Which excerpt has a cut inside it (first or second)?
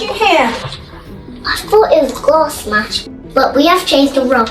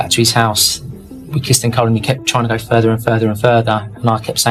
first